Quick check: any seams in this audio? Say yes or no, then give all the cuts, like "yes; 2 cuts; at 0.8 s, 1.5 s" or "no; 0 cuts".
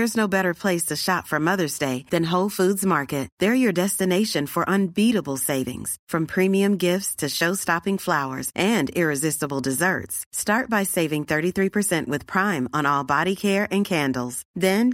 no; 0 cuts